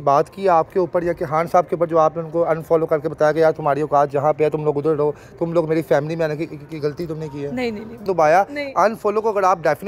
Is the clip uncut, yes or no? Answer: no